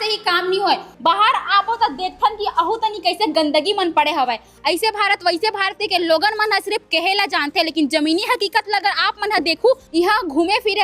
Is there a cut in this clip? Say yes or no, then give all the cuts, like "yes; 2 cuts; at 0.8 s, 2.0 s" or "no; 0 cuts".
yes; 3 cuts; at 0.9 s, 4.5 s, 9.8 s